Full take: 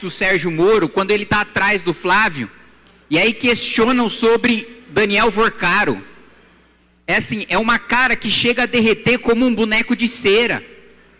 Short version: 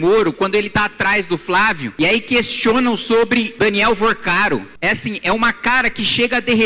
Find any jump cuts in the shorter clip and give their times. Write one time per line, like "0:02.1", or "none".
0:01.9
0:03.5
0:04.7